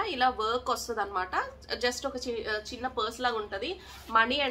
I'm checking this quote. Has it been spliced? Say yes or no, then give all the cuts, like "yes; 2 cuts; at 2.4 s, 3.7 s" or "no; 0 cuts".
no; 0 cuts